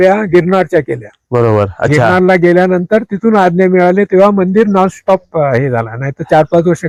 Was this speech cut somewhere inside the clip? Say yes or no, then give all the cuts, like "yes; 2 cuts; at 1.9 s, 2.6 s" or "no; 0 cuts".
no; 0 cuts